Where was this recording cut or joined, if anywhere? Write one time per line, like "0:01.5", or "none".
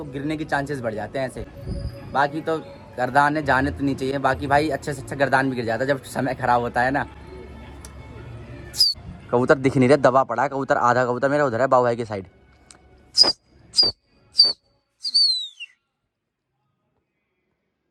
none